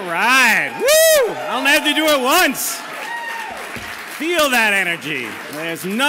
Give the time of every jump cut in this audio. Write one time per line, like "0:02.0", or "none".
0:03.9